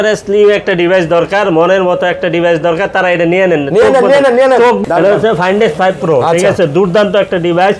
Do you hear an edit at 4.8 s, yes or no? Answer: yes